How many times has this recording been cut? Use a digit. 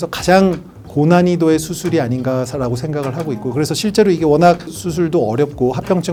0